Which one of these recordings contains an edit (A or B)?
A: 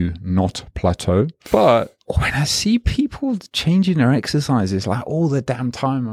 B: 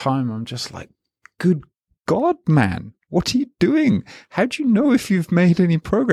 A